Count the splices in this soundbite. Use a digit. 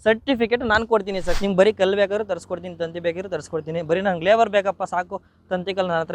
1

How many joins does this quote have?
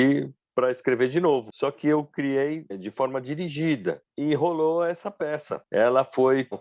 4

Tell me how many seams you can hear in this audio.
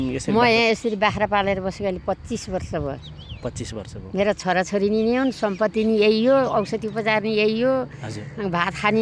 0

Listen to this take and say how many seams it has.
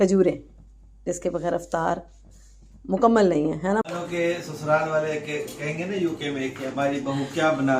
1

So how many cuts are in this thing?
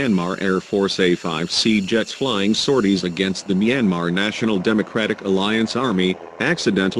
1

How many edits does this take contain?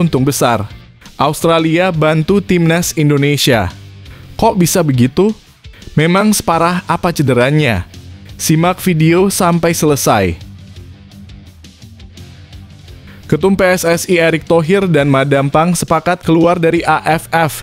2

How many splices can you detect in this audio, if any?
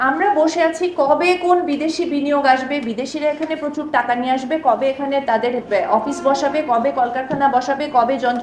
0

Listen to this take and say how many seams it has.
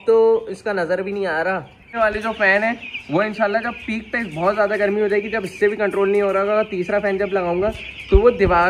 1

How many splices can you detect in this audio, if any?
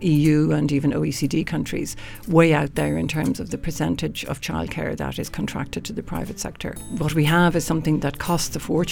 1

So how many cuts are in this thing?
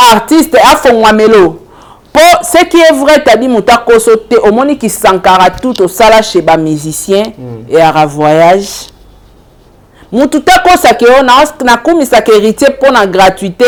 0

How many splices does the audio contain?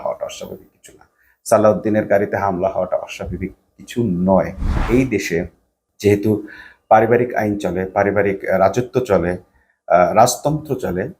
1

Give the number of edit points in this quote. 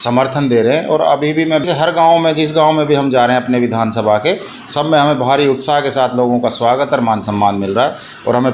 1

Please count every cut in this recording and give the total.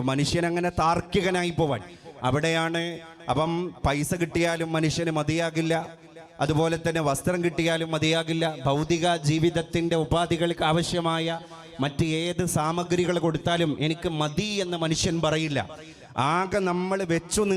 0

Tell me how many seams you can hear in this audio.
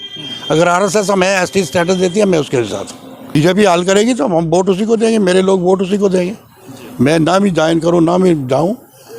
1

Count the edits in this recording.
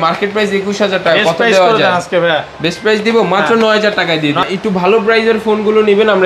1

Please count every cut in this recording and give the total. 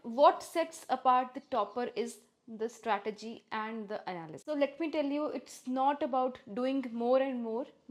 0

